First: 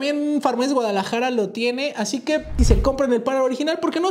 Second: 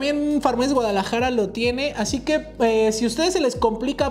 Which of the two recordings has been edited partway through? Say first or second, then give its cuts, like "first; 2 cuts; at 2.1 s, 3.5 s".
first; 1 cut; at 2.5 s